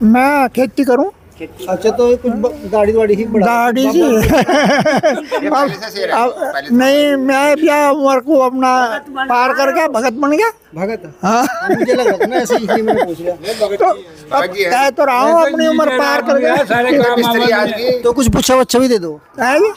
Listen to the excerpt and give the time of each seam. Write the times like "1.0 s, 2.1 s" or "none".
none